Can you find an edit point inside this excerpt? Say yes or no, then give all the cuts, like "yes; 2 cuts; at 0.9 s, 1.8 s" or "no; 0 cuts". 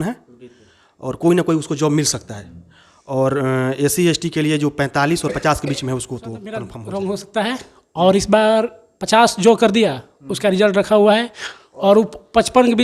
yes; 1 cut; at 6.7 s